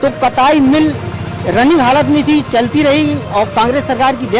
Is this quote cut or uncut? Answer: uncut